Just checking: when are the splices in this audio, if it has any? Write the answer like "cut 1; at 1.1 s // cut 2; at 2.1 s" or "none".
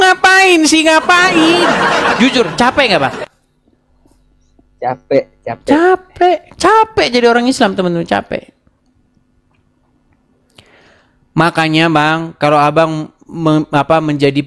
cut 1; at 2.1 s